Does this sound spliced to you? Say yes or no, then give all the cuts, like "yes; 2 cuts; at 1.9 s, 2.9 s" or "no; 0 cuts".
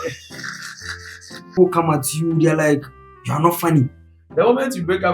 yes; 2 cuts; at 1.5 s, 4.0 s